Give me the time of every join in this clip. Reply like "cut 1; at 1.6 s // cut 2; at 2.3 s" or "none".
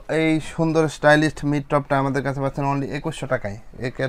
none